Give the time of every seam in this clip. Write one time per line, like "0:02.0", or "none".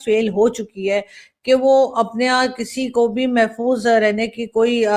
none